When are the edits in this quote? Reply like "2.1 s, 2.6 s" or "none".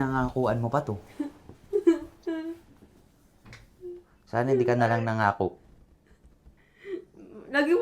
6.6 s